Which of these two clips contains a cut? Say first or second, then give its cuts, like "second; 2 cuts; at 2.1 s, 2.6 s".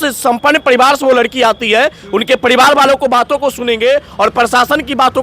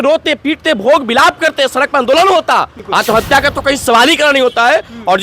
second; 1 cut; at 2.8 s